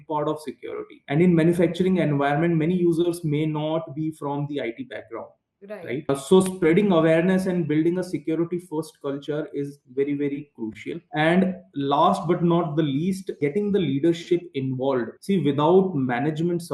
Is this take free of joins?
yes; 0 cuts

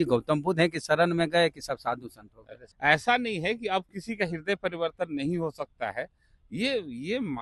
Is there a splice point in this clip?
yes; 1 cut; at 2.7 s

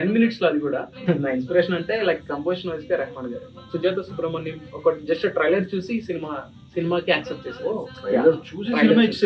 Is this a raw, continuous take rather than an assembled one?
no; 2 cuts; at 0.9 s, 3.6 s

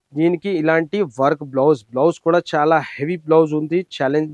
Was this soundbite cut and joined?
no; 0 cuts

